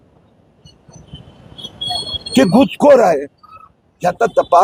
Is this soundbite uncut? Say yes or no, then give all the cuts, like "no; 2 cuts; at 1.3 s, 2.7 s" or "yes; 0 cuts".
yes; 0 cuts